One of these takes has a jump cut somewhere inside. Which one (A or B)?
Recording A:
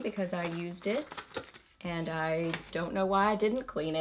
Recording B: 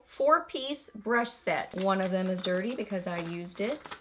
B